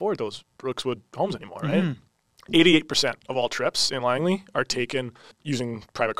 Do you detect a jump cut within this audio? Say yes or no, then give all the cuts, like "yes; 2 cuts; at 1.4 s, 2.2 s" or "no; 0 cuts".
yes; 2 cuts; at 2.1 s, 5.3 s